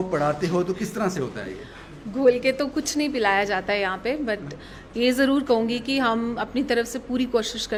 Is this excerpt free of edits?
yes; 0 cuts

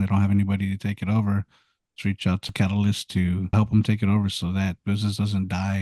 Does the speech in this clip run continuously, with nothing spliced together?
no; 2 cuts; at 2.5 s, 3.5 s

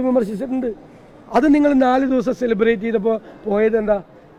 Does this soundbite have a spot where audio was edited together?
no; 0 cuts

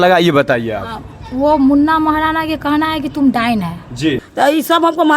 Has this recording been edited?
yes; 1 cut; at 4.2 s

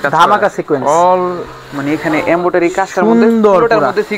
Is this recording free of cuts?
yes; 0 cuts

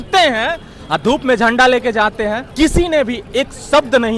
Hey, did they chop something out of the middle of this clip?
yes; 1 cut; at 2.4 s

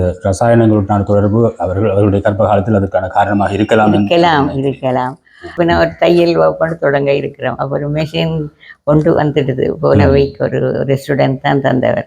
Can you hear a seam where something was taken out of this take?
yes; 1 cut; at 5.4 s

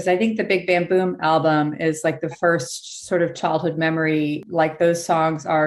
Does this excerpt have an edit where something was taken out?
yes; 1 cut; at 4.4 s

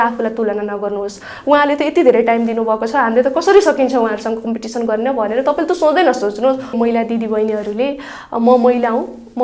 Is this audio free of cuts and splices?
no; 1 cut; at 6.7 s

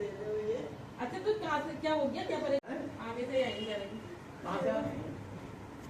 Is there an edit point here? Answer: yes; 1 cut; at 2.6 s

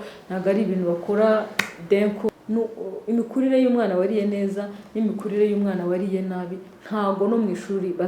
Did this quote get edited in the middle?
yes; 1 cut; at 2.3 s

